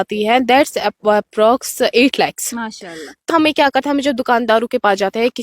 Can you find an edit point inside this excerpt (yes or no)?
yes